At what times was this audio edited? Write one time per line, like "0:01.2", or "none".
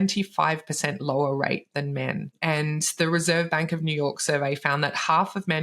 0:02.4